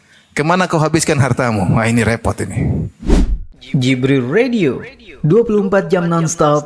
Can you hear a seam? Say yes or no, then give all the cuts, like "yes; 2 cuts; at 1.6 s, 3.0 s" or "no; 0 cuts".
yes; 1 cut; at 2.9 s